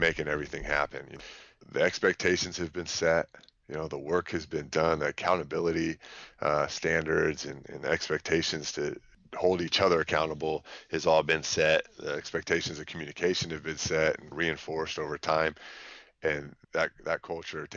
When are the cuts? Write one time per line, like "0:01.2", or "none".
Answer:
0:01.1
0:09.1
0:14.3
0:16.5